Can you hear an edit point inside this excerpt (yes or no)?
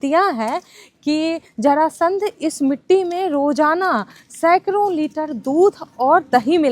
no